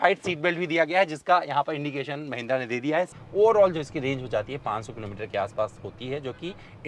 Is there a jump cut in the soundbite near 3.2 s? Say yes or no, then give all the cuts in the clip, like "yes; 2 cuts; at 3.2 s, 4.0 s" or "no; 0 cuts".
yes; 1 cut; at 3.2 s